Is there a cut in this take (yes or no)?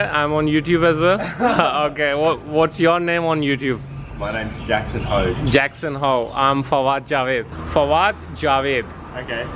yes